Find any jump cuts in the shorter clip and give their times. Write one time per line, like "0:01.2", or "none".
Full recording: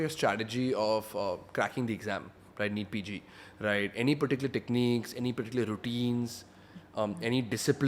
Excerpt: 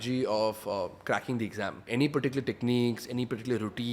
0:01.8